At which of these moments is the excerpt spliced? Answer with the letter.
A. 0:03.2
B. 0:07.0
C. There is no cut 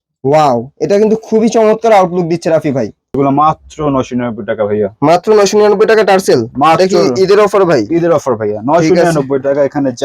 A